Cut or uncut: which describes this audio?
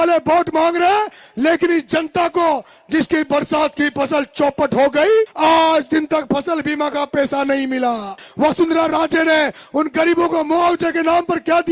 cut